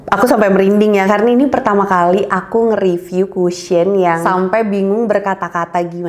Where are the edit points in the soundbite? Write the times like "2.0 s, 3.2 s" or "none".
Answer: 4.2 s